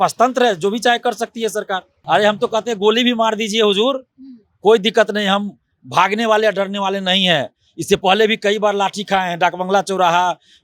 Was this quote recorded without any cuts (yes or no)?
no